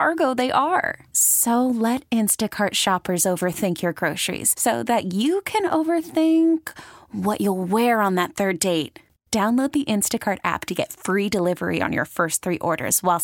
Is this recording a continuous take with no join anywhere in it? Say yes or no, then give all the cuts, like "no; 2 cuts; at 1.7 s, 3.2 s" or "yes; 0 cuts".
yes; 0 cuts